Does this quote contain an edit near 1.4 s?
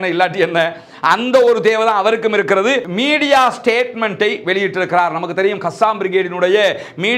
no; 1 cut; at 2.9 s

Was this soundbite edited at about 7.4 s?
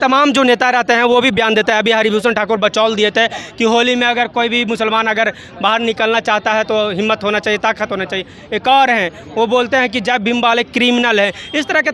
no; 0 cuts

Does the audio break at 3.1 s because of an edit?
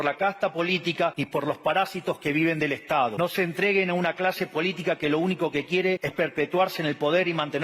yes; 3 cuts; at 1.2 s, 3.1 s, 6.1 s

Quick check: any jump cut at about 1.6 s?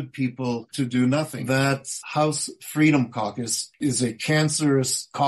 yes; 2 cuts; at 1.6 s, 3.8 s

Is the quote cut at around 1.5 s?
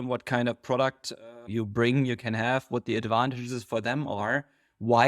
yes; 1 cut; at 1.5 s

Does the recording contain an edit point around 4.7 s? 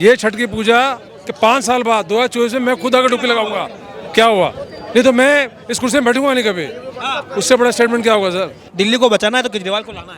no; 1 cut; at 8.6 s

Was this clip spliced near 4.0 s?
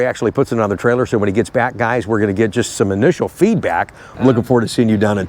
yes; 1 cut; at 4.0 s

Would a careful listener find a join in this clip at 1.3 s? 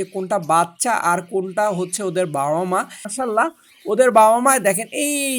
no; 1 cut; at 3.1 s

